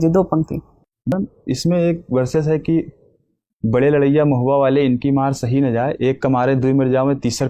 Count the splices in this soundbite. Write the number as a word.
one